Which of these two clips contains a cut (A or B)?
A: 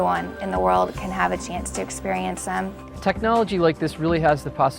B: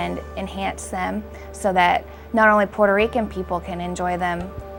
A